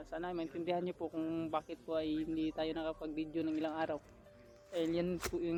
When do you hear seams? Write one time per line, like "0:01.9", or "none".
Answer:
none